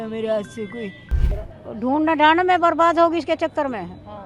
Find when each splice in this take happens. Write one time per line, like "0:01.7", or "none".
0:01.2